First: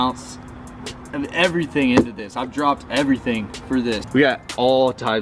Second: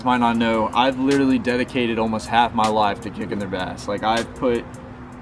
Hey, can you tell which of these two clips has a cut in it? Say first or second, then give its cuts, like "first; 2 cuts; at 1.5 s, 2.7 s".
first; 1 cut; at 4.0 s